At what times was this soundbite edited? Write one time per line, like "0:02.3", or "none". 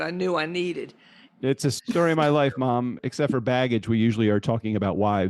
0:01.8
0:03.0